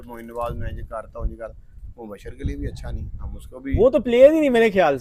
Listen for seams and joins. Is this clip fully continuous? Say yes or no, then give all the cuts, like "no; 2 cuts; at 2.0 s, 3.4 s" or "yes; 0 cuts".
yes; 0 cuts